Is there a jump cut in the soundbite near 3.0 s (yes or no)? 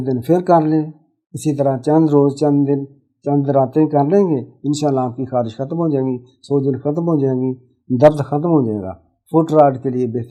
no